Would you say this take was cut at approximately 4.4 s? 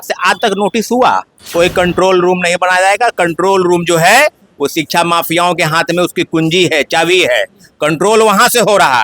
no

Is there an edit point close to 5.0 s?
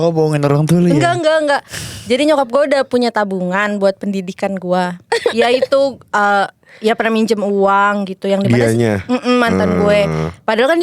yes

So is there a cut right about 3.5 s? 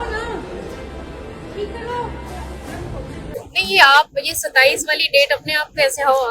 yes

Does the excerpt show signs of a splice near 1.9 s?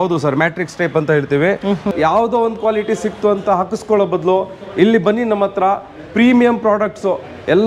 yes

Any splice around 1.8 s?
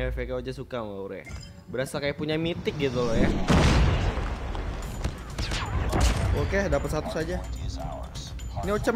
no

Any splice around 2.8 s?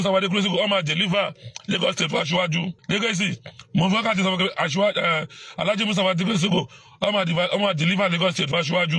yes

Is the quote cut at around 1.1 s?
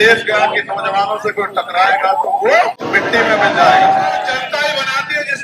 no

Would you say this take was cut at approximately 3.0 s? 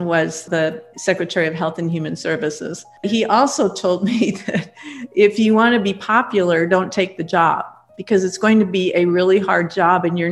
yes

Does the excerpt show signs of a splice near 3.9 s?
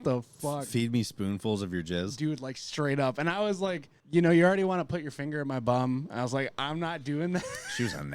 yes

